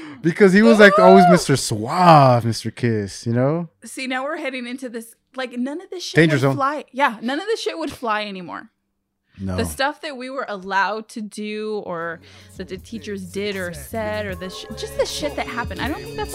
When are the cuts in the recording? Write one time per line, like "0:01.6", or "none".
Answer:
none